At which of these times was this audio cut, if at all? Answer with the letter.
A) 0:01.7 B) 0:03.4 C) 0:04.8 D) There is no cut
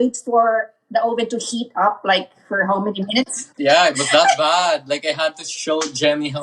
B